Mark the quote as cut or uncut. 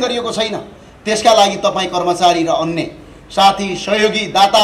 uncut